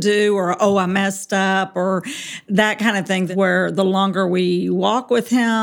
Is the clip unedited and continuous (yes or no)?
no